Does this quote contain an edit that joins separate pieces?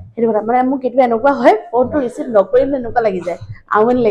no; 0 cuts

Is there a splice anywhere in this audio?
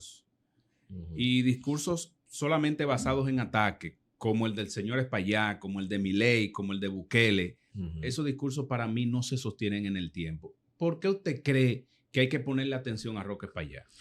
no; 0 cuts

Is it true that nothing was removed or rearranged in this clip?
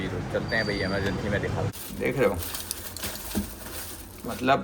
no; 1 cut; at 1.7 s

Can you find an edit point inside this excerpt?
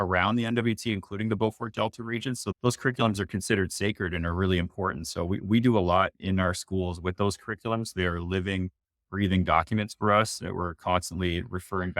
yes; 1 cut; at 2.5 s

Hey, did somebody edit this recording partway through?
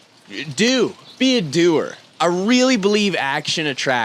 no; 0 cuts

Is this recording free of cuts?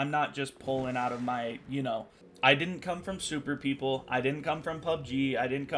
no; 1 cut; at 2.2 s

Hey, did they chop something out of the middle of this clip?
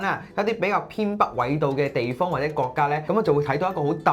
yes; 1 cut; at 3.0 s

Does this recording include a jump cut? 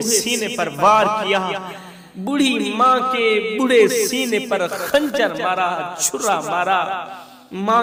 no; 0 cuts

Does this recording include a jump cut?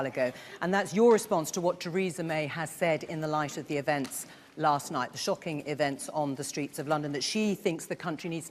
yes; 1 cut; at 5.0 s

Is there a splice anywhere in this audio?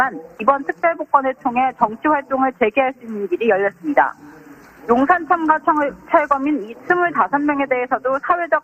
no; 0 cuts

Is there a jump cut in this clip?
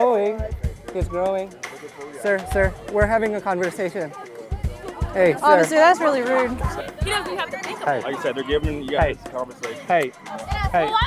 yes; 1 cut; at 6.7 s

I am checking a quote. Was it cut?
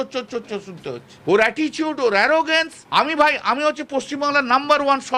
yes; 2 cuts; at 1.1 s, 2.8 s

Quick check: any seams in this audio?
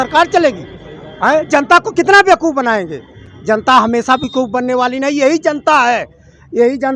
no; 0 cuts

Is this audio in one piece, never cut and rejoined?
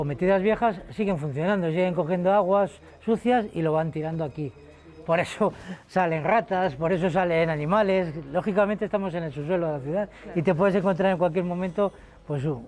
yes; 0 cuts

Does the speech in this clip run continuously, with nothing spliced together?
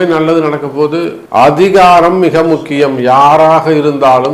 no; 1 cut; at 1.2 s

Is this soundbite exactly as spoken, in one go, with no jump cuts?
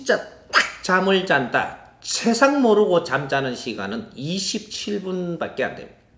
yes; 0 cuts

